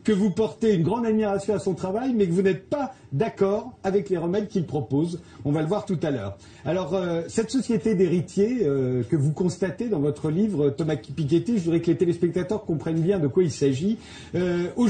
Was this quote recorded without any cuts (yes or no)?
no